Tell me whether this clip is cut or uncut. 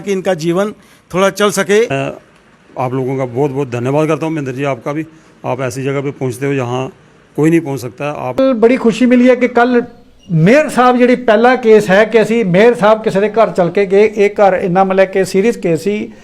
cut